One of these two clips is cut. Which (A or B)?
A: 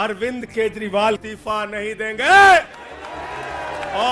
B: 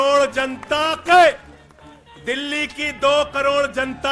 A